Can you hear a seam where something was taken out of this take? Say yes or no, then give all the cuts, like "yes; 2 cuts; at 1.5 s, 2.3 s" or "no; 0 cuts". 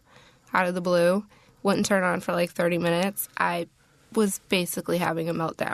no; 0 cuts